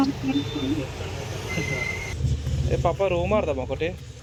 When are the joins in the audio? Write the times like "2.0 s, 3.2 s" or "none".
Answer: none